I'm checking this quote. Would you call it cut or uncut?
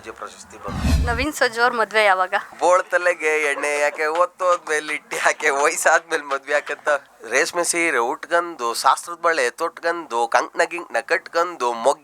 cut